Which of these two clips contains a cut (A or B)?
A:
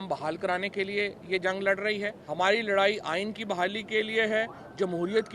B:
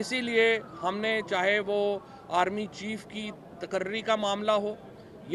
A